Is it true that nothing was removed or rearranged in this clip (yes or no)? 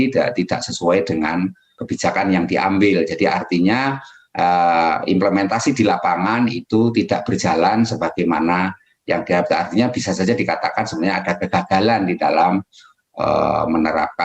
no